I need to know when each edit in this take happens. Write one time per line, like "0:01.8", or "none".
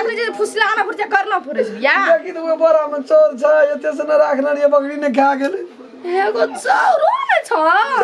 none